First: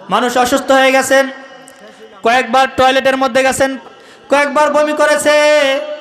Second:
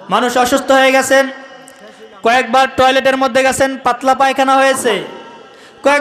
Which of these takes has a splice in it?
first; 1 cut; at 3.8 s

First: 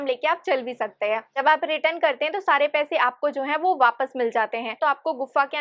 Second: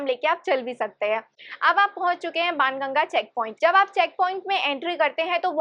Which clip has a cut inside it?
first; 2 cuts; at 1.4 s, 4.8 s

